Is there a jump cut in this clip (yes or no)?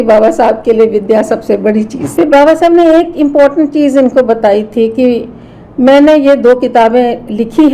yes